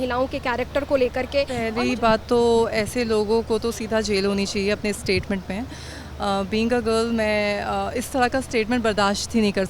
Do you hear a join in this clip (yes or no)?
yes